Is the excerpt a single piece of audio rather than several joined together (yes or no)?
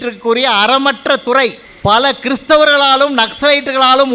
no